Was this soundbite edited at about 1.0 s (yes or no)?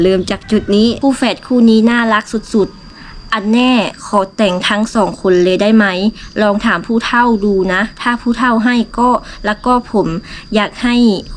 yes